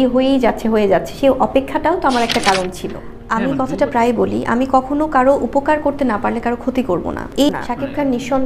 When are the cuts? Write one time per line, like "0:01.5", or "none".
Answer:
0:02.9
0:07.3